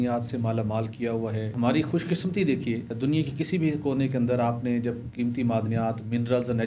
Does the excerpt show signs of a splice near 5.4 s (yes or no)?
no